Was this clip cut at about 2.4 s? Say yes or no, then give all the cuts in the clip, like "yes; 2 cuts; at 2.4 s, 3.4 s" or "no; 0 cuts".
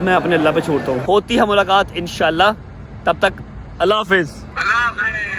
no; 2 cuts; at 1.0 s, 4.5 s